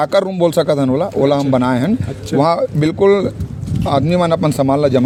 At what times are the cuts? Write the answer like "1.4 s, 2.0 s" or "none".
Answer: none